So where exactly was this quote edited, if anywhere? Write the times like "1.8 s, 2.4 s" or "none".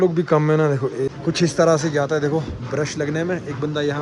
1.1 s

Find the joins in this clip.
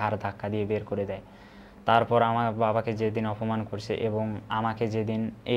none

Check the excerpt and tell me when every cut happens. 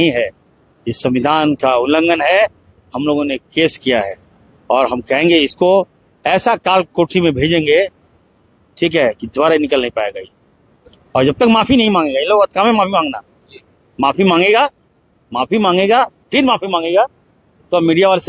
none

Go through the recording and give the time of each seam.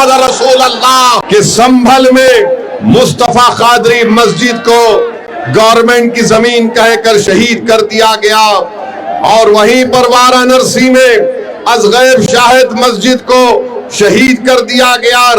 1.2 s

